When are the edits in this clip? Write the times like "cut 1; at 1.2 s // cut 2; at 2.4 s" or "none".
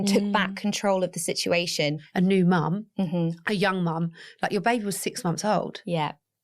cut 1; at 2.0 s